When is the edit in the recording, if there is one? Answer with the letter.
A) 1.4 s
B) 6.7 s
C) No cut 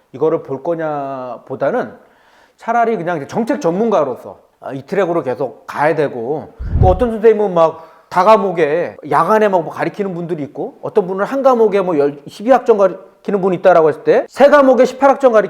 B